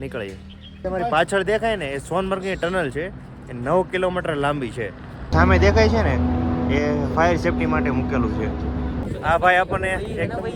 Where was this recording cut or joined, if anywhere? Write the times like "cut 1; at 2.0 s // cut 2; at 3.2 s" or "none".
cut 1; at 0.8 s // cut 2; at 5.3 s // cut 3; at 9.0 s